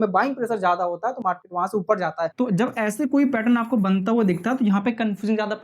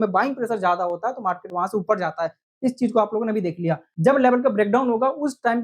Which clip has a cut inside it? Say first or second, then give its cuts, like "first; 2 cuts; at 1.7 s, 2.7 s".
first; 1 cut; at 2.3 s